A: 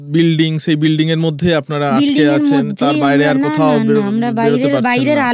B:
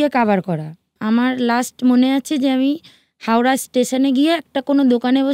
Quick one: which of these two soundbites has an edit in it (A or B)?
B